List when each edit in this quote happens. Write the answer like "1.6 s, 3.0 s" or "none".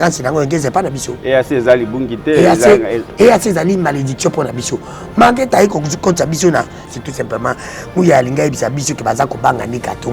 6.9 s